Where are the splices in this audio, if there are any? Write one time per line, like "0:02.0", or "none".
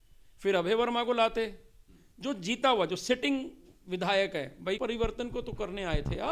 0:04.8